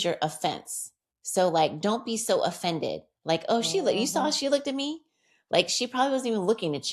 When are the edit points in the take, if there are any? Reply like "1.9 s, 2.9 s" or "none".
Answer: none